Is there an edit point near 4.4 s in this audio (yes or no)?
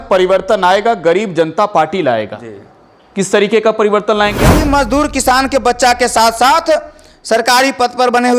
yes